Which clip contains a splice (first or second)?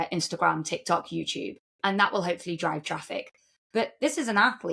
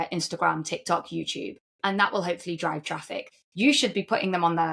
second